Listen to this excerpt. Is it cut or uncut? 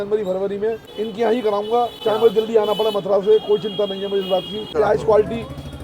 cut